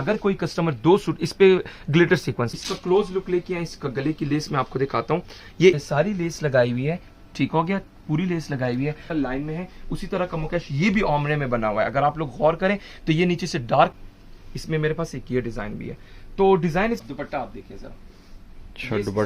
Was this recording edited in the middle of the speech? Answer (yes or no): yes